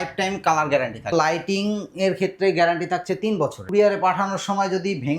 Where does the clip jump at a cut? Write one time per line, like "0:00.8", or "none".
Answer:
0:01.1
0:03.6